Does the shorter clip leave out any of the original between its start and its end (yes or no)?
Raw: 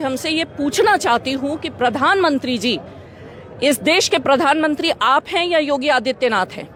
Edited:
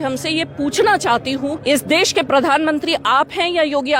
yes